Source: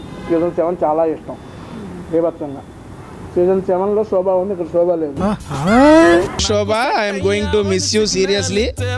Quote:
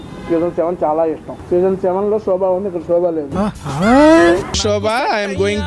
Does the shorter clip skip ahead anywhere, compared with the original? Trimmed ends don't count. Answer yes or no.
yes